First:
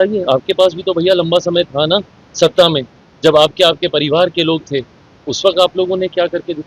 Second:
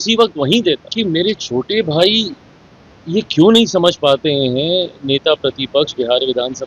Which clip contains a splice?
second; 1 cut; at 0.9 s

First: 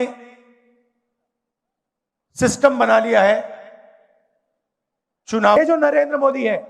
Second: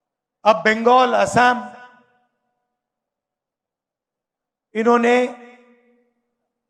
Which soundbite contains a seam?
first; 1 cut; at 5.6 s

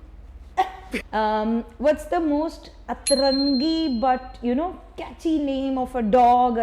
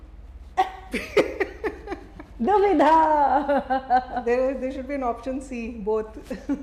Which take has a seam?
first; 1 cut; at 1.1 s

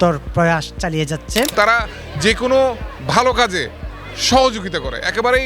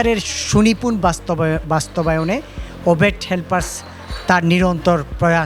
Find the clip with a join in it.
first; 1 cut; at 1.5 s

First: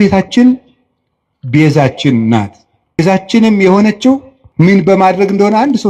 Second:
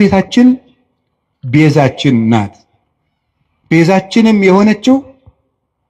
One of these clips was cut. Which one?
first; 2 cuts; at 3.0 s, 4.6 s

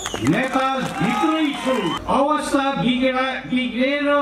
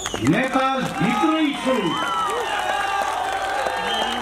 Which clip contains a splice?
first; 1 cut; at 2.0 s

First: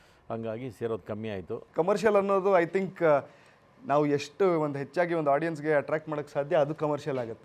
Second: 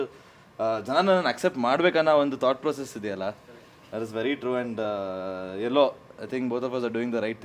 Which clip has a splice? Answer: first; 1 cut; at 1.6 s

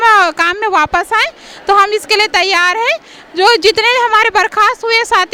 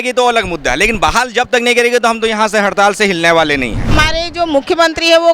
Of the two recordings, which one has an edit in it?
second; 1 cut; at 3.9 s

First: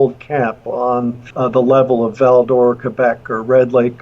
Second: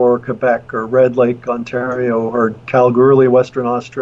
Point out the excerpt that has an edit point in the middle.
first; 1 cut; at 1.2 s

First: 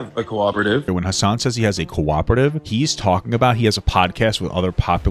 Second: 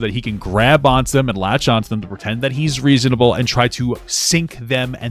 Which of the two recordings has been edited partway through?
first; 2 cuts; at 0.9 s, 2.6 s

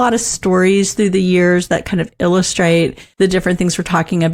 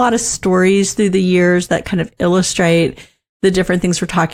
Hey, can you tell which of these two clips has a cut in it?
first; 1 cut; at 3.0 s

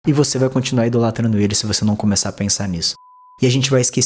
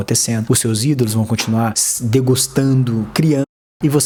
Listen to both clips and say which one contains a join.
first; 1 cut; at 2.8 s

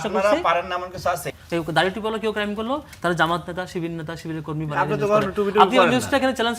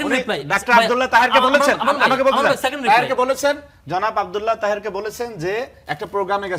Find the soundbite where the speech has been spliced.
first; 1 cut; at 1.3 s

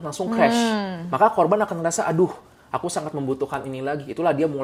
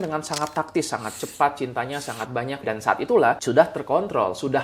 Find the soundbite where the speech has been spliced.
second; 2 cuts; at 2.6 s, 3.4 s

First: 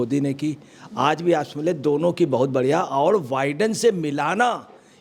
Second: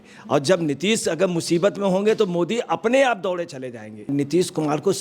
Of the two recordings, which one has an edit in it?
second; 1 cut; at 4.1 s

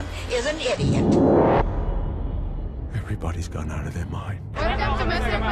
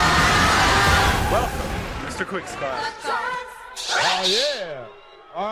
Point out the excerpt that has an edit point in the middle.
first; 1 cut; at 4.6 s

